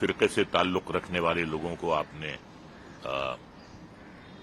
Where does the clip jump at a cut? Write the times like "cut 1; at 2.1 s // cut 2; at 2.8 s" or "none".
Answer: none